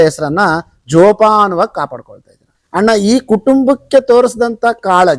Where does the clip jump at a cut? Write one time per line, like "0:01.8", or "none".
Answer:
0:02.6